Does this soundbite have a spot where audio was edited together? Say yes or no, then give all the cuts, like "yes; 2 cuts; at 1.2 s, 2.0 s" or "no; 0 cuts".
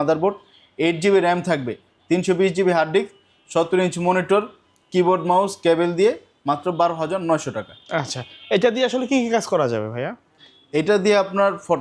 no; 0 cuts